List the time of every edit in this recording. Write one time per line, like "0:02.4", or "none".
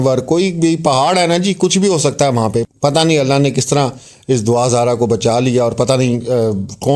0:02.6